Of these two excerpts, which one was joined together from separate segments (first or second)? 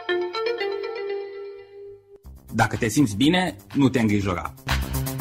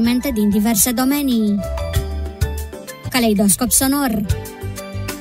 first